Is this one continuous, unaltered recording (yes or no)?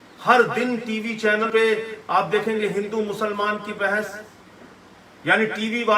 no